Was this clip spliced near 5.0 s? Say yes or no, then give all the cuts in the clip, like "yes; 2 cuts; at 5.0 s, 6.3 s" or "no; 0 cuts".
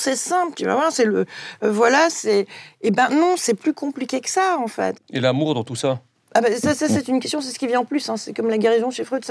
yes; 1 cut; at 5.0 s